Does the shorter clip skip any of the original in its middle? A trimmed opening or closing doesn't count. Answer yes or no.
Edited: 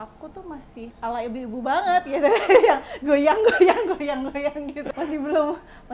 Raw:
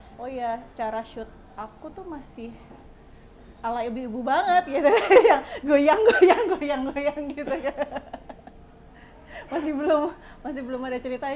yes